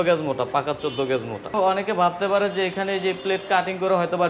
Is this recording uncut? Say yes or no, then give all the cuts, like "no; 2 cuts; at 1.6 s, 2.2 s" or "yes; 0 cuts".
no; 1 cut; at 1.5 s